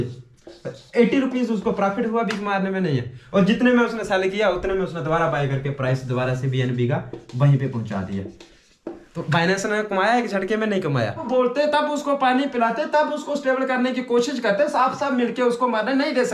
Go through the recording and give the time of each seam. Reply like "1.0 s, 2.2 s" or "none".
11.2 s